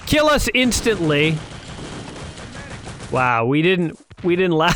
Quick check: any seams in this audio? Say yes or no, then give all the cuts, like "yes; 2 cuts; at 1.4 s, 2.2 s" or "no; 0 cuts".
no; 0 cuts